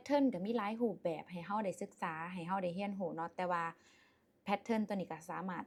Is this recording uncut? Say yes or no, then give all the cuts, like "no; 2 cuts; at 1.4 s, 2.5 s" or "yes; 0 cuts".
yes; 0 cuts